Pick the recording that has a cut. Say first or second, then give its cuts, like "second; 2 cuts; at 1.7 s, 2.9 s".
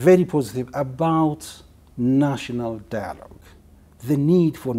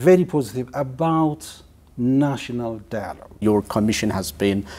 second; 1 cut; at 3.3 s